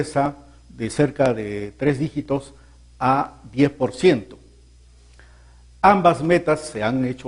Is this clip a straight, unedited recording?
no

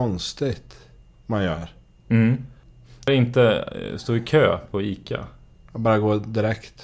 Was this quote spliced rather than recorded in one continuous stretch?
yes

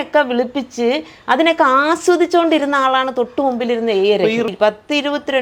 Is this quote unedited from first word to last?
no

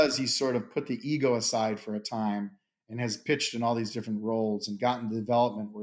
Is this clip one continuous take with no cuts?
yes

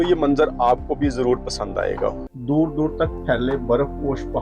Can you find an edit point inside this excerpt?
yes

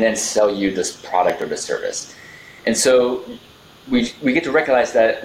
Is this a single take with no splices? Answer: yes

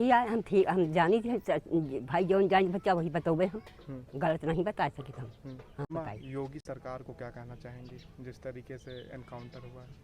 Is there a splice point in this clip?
yes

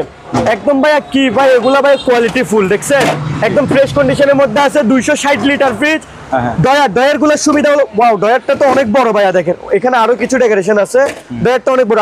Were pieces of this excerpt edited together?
no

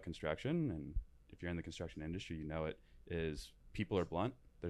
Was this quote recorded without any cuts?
yes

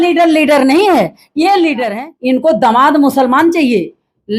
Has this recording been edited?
yes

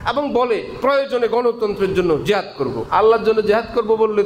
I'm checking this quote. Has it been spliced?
yes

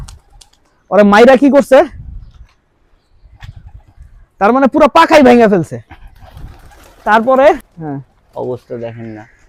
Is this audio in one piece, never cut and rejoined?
yes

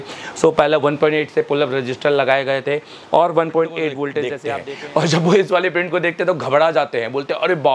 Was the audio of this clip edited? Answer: yes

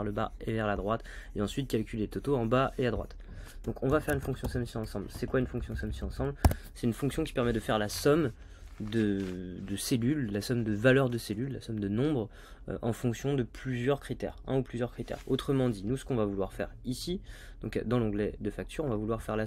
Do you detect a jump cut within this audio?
no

